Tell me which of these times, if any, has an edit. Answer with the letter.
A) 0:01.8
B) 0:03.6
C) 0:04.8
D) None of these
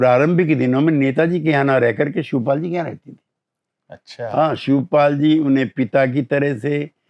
D